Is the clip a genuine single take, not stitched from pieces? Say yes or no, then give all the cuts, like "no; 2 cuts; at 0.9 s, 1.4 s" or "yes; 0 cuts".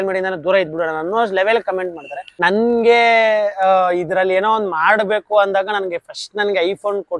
no; 1 cut; at 2.3 s